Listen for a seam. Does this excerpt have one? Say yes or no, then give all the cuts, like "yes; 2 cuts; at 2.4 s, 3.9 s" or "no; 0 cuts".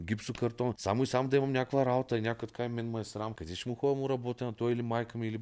yes; 2 cuts; at 0.8 s, 3.5 s